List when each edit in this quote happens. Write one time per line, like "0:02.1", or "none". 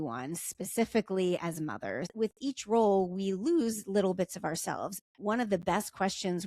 0:02.1
0:04.9